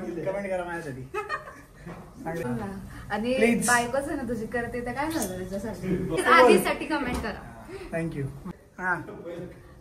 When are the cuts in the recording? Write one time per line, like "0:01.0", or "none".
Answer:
0:02.4
0:06.2
0:08.5